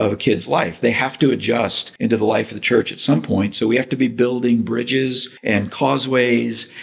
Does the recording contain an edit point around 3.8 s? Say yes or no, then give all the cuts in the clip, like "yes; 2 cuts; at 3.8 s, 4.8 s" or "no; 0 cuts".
no; 2 cuts; at 1.8 s, 5.3 s